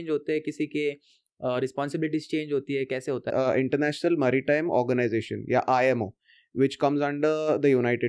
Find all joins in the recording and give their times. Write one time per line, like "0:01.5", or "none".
0:03.3